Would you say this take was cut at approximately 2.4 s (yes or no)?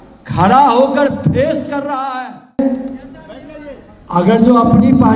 yes